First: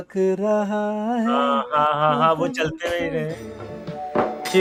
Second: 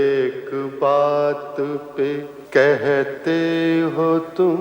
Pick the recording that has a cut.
second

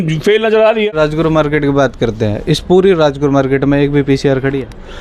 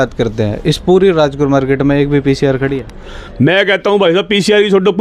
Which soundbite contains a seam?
first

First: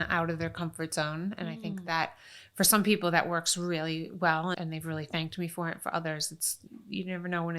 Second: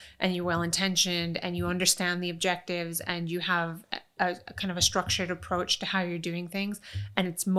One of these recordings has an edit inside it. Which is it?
first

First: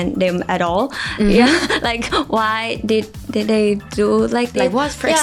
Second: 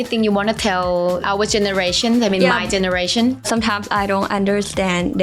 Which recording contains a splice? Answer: second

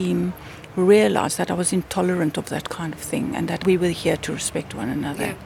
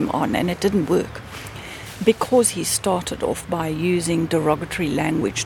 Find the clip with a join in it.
first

